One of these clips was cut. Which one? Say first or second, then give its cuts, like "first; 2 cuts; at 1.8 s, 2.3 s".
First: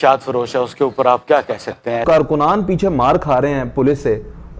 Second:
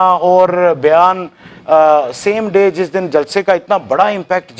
first; 1 cut; at 2.0 s